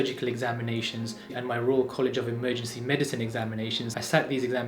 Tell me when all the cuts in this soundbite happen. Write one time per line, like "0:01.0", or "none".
0:01.2